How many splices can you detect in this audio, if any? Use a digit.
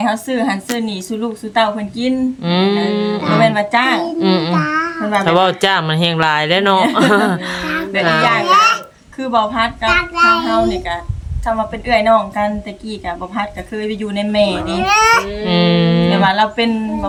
0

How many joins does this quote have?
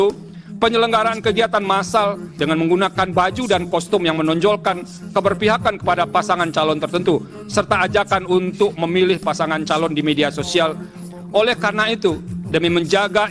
2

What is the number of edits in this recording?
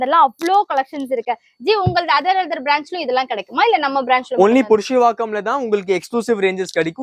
0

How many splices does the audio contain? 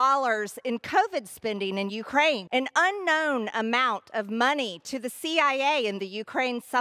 1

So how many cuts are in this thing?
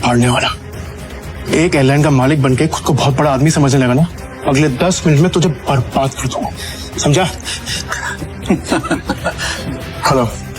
2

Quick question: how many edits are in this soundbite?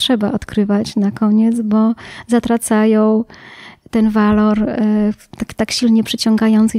0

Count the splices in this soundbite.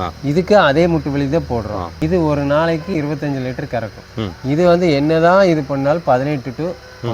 2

